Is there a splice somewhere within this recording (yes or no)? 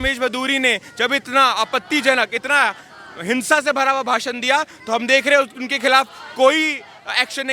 no